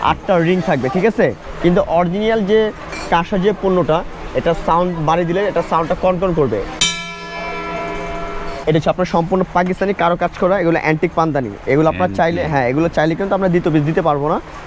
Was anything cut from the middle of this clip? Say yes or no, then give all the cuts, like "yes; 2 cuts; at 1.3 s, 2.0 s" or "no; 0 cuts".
yes; 2 cuts; at 1.5 s, 8.6 s